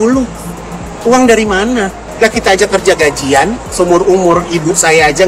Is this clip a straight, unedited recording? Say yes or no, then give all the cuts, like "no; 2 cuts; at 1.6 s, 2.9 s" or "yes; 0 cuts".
no; 2 cuts; at 2.0 s, 3.6 s